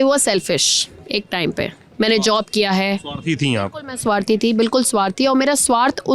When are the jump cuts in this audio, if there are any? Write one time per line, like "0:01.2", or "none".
none